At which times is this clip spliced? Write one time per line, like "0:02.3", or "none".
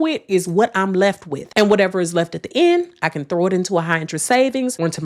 none